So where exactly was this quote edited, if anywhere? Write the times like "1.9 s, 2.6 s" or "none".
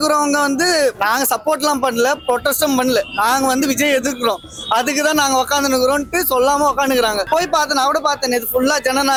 none